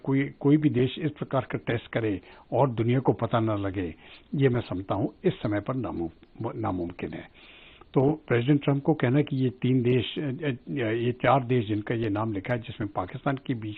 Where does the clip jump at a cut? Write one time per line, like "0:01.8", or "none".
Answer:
none